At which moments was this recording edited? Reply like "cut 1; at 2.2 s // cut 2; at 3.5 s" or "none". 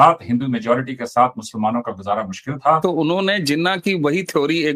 cut 1; at 2.8 s